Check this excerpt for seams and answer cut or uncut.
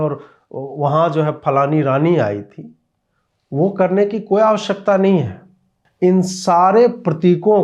uncut